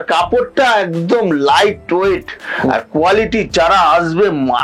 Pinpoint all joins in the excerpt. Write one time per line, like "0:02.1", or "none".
none